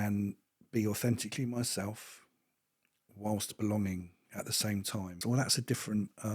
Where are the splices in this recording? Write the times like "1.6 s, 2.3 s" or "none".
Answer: 5.1 s

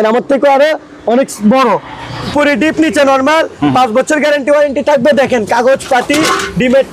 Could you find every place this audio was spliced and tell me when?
2.3 s

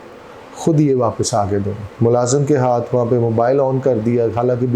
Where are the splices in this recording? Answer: 1.8 s

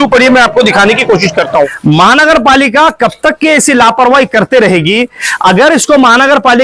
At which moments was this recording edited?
1.8 s

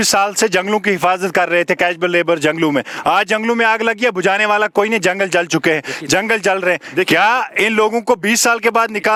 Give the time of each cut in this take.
none

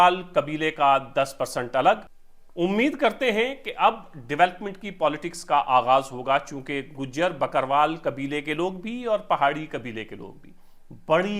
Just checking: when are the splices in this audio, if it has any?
2.1 s

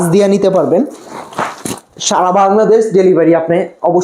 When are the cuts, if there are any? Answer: none

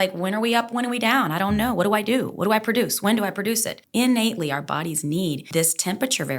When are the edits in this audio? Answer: 3.8 s, 5.4 s

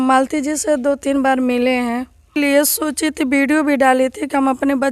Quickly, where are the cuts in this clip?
2.3 s

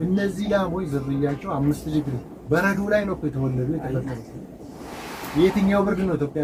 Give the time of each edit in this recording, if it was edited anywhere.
none

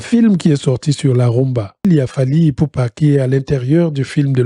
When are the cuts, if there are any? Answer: 1.8 s

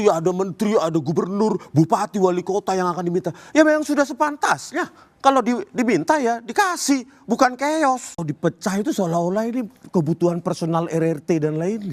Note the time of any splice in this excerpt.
8.2 s

